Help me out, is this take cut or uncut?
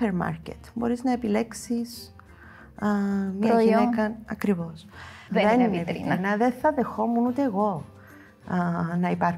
cut